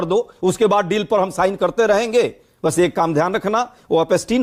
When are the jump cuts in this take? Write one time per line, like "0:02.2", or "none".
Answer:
none